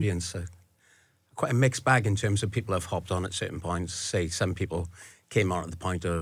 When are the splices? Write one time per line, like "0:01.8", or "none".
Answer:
none